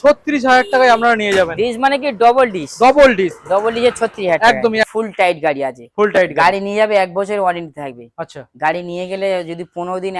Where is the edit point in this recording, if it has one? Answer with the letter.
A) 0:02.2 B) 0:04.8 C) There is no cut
B